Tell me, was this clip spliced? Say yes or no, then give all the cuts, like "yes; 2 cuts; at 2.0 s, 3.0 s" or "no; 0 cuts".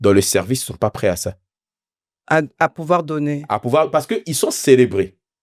no; 0 cuts